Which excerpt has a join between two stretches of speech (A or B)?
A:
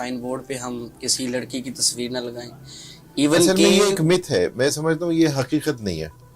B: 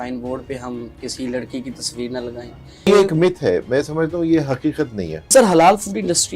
B